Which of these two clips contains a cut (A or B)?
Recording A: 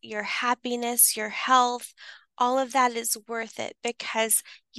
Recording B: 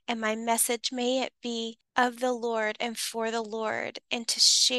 B